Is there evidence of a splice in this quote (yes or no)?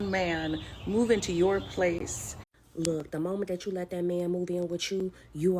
yes